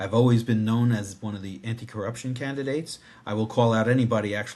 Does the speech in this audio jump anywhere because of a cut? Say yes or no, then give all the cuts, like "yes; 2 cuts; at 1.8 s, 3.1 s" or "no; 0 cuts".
no; 0 cuts